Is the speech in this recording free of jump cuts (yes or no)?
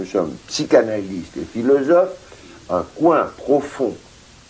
no